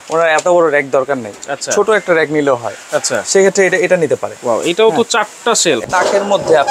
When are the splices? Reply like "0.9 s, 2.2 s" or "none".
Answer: 5.8 s

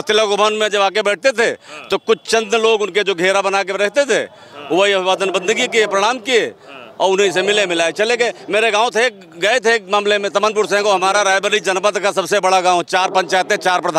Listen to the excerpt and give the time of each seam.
none

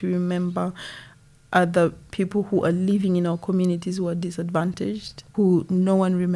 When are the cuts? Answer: 2.0 s, 5.2 s

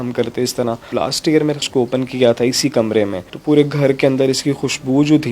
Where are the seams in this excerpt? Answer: 0.9 s, 3.3 s

